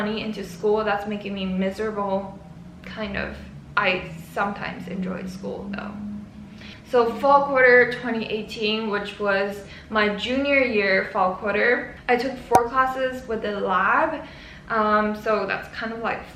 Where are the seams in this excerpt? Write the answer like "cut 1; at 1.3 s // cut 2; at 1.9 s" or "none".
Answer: none